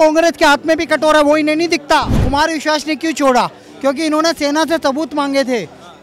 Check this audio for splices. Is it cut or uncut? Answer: cut